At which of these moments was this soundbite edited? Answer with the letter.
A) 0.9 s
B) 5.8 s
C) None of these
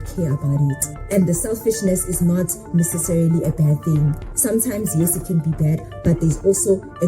A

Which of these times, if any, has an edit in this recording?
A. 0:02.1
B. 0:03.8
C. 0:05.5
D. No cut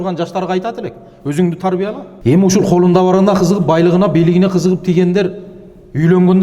A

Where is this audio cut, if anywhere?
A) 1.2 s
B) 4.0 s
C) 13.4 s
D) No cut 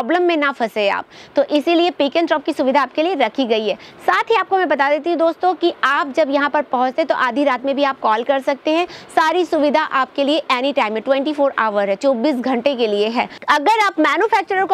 C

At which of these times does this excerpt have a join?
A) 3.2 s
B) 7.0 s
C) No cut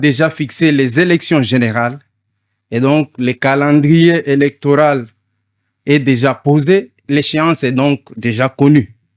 B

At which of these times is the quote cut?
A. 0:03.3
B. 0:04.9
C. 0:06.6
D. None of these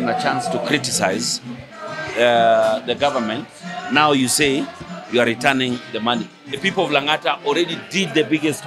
C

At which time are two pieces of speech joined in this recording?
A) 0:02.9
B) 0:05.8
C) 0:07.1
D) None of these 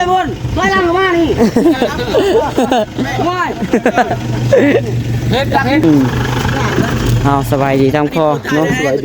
B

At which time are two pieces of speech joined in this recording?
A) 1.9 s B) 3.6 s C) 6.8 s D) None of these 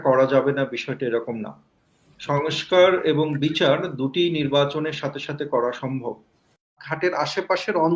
C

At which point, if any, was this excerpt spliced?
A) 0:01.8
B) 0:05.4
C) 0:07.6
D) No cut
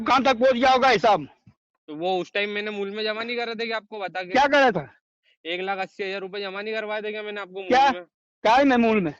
A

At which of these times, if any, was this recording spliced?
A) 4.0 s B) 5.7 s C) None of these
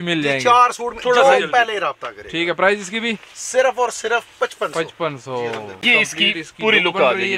B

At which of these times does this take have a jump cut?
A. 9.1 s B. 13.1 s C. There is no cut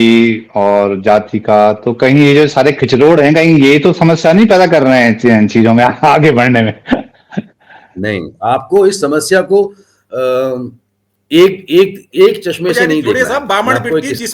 B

